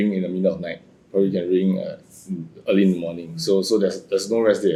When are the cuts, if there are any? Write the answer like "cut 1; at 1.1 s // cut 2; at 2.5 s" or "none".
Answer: none